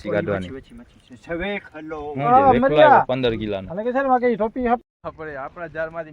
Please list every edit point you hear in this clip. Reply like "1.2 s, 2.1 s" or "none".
4.8 s

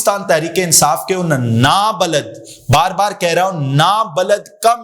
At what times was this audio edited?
none

